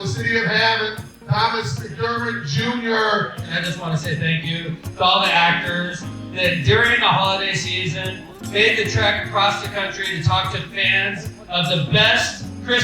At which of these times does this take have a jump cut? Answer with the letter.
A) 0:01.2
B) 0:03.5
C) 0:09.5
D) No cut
B